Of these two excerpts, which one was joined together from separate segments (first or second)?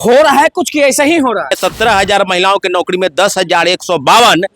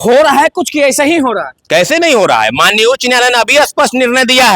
first